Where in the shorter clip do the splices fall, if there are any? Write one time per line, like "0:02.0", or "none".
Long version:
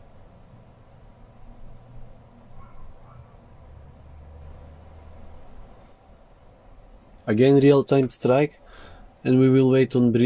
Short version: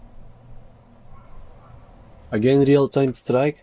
0:02.2